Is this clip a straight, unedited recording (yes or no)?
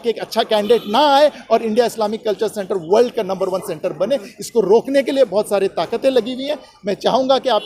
yes